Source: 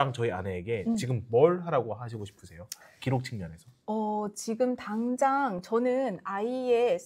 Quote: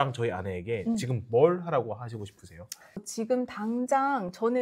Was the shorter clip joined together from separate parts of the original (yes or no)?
yes